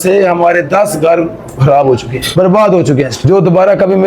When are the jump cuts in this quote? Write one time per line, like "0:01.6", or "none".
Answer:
none